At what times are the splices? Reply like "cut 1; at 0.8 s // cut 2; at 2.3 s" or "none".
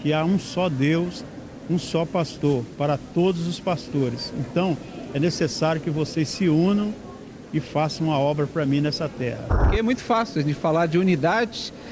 cut 1; at 9.6 s